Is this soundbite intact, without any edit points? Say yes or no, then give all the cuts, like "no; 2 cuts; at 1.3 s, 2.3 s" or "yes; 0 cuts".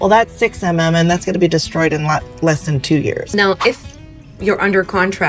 no; 1 cut; at 3.2 s